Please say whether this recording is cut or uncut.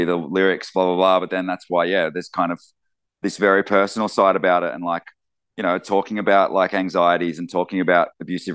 uncut